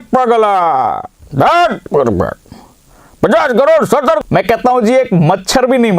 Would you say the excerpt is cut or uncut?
cut